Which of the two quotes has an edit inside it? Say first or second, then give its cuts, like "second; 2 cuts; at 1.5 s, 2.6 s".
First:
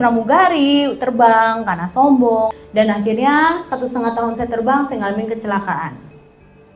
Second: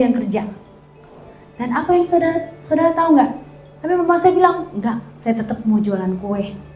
first; 1 cut; at 2.6 s